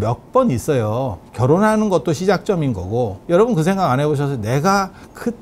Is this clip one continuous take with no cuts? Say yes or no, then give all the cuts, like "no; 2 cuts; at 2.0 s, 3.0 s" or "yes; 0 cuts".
no; 2 cuts; at 1.2 s, 3.2 s